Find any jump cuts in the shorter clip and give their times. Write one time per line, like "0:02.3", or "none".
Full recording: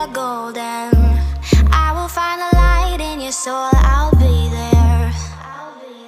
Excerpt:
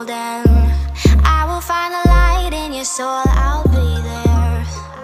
none